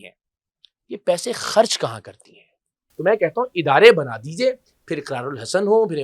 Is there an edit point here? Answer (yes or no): yes